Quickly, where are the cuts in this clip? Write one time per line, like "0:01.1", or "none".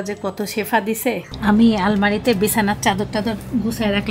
0:01.3

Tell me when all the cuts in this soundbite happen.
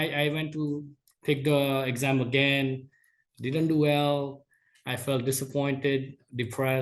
none

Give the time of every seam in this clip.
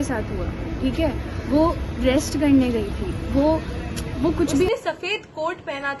0:04.7

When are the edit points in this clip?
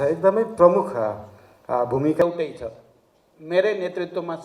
0:02.2

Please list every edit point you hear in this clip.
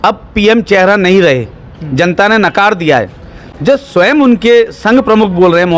none

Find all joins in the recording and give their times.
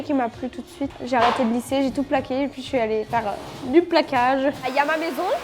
0:00.9
0:04.6

